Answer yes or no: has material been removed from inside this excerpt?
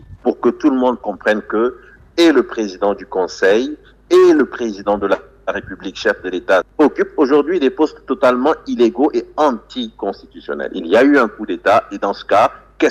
yes